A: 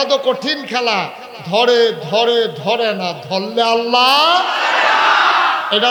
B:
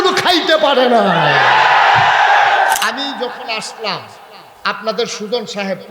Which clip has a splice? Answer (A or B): B